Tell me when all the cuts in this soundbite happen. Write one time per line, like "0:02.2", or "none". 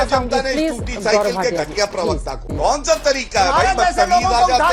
0:02.3